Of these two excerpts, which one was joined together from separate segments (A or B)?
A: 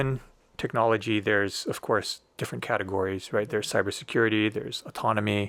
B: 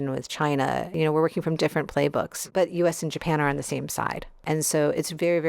B